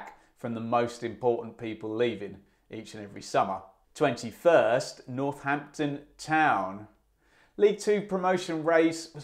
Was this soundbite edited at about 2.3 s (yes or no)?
no